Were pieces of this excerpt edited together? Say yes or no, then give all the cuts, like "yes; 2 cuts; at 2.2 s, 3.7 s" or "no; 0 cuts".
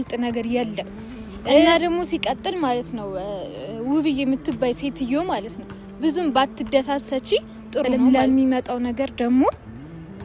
yes; 2 cuts; at 1.6 s, 7.9 s